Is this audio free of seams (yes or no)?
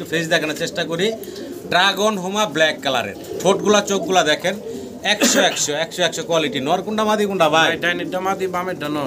yes